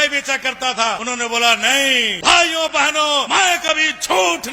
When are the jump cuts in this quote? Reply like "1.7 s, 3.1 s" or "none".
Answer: 1.0 s, 2.1 s, 3.3 s